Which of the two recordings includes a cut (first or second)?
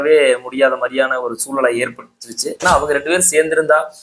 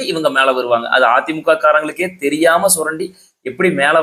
first